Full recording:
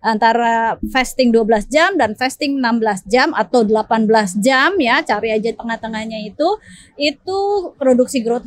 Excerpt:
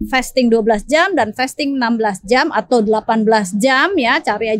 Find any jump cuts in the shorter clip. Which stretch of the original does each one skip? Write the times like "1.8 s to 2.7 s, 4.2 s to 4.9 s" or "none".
none